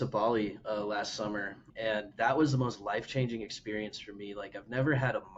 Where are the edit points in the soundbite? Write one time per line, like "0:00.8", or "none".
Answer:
0:01.7